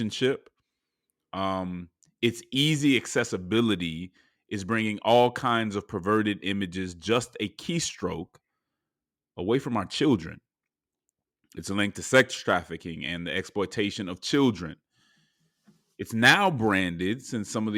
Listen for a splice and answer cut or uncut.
uncut